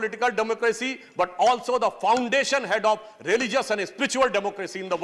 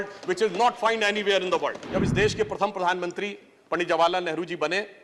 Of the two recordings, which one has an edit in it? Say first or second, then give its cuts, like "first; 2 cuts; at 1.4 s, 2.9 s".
second; 1 cut; at 1.8 s